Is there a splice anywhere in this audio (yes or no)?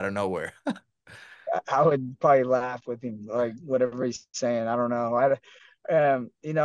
no